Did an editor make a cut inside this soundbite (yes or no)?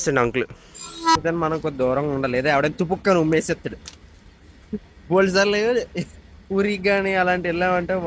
yes